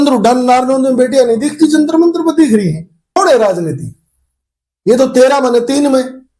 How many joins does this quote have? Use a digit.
1